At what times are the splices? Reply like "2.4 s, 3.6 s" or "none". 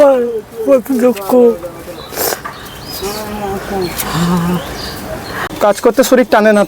5.5 s